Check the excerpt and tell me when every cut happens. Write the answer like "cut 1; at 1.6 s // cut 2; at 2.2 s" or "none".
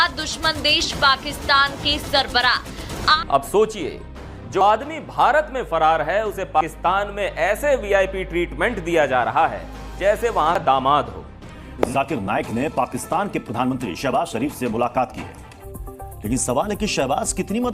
cut 1; at 3.2 s // cut 2; at 11.9 s // cut 3; at 15.6 s